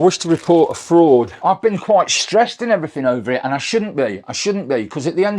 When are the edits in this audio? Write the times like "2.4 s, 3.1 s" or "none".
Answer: 1.3 s